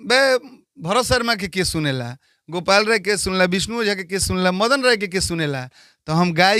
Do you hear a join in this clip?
no; 0 cuts

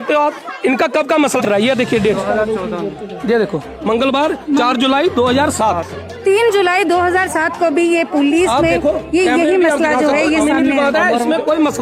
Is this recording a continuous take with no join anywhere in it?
no; 1 cut; at 1.4 s

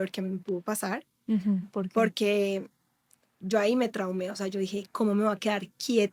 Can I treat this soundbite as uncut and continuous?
yes; 0 cuts

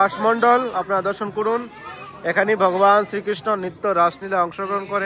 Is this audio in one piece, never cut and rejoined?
yes; 0 cuts

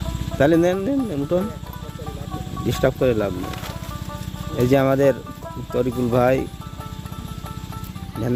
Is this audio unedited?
yes; 0 cuts

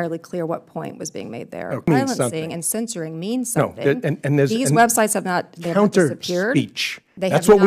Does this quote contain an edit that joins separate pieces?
yes; 1 cut; at 1.9 s

